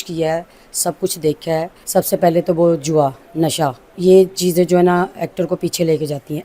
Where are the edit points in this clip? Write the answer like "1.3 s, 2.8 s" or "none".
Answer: 1.8 s

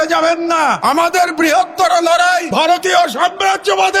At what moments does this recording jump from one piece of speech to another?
0.8 s, 2.5 s

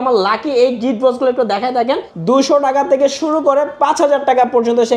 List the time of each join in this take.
2.1 s

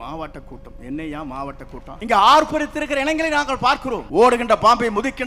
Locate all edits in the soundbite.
1.9 s, 4.0 s

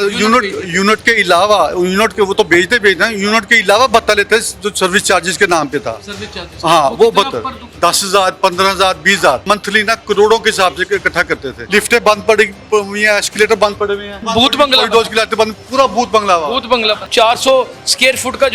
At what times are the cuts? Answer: 7.7 s, 9.4 s, 11.5 s, 14.2 s, 17.1 s

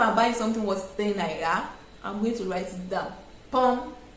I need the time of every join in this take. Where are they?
none

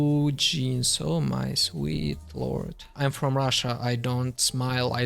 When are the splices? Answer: 2.9 s

